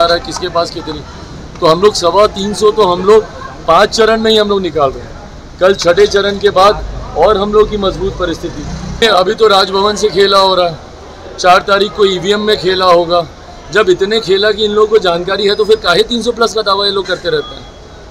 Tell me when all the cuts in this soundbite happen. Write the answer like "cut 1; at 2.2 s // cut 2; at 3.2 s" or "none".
cut 1; at 9.0 s